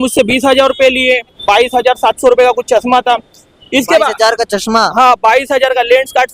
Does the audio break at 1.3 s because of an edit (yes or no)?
yes